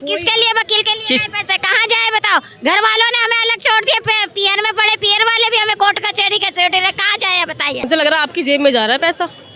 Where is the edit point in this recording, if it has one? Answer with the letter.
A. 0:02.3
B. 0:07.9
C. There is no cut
B